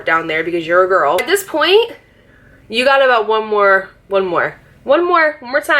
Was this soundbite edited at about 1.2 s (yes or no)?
yes